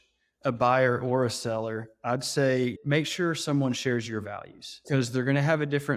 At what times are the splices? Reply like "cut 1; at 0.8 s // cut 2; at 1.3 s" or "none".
cut 1; at 2.8 s // cut 2; at 4.8 s

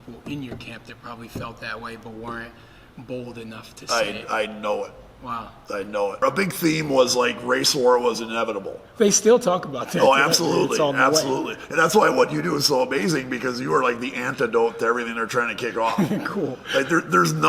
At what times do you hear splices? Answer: cut 1; at 6.2 s

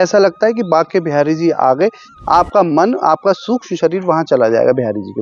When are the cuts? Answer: cut 1; at 2.0 s

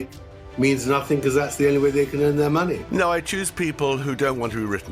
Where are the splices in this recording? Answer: cut 1; at 3.0 s

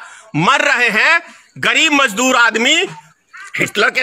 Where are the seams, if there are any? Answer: cut 1; at 3.0 s

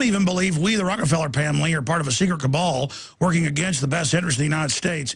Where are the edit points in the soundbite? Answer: none

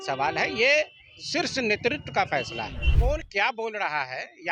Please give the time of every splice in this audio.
cut 1; at 2.8 s

